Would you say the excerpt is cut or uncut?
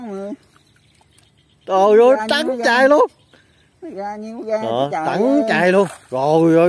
uncut